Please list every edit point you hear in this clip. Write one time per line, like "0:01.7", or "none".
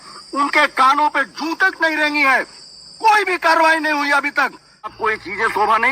0:04.9